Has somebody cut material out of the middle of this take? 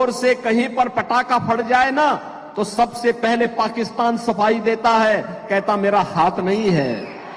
no; 0 cuts

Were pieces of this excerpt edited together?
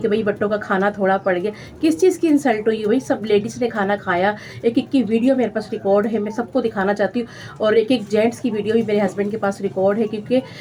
no; 0 cuts

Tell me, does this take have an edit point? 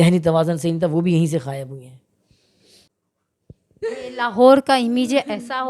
no; 0 cuts

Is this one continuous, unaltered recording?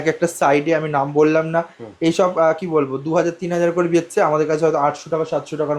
yes; 0 cuts

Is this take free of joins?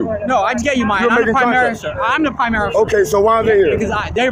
yes; 0 cuts

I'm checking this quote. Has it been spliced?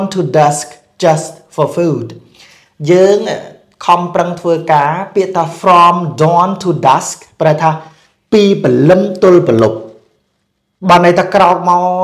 no; 0 cuts

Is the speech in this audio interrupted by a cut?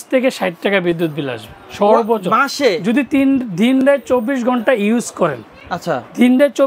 no; 0 cuts

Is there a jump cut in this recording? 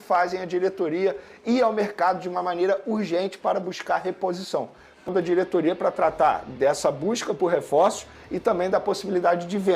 yes; 1 cut; at 5.1 s

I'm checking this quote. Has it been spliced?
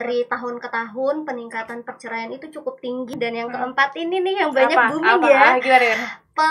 yes; 1 cut; at 3.1 s

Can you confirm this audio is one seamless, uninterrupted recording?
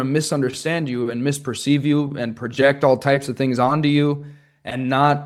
yes; 0 cuts

